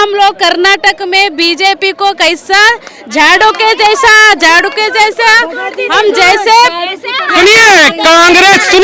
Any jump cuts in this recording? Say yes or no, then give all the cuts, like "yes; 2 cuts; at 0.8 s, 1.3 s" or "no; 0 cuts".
no; 0 cuts